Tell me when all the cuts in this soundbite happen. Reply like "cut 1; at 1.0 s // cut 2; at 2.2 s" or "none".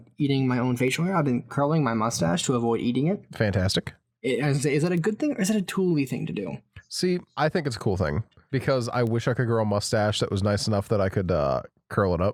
none